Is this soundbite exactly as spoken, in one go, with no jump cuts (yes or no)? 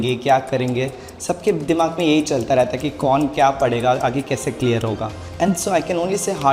no